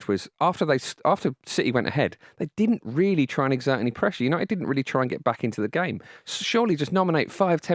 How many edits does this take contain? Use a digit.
0